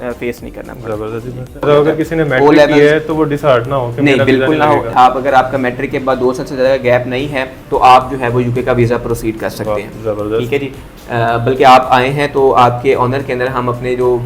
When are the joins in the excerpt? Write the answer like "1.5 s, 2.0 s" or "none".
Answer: 1.6 s, 4.9 s, 7.6 s, 10.8 s